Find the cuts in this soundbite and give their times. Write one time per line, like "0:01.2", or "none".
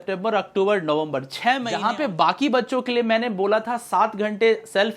0:01.7